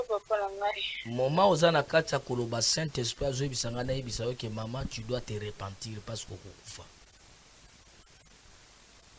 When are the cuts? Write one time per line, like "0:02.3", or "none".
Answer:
none